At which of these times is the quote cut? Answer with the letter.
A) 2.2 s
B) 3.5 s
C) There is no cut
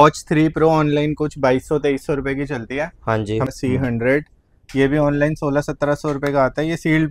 B